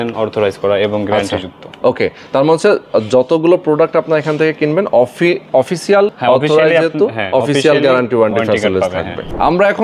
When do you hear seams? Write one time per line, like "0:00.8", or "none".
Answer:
none